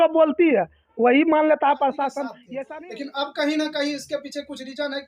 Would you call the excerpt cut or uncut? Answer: cut